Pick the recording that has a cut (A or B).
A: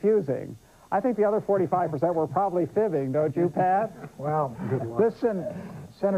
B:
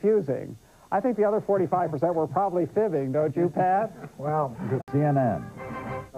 A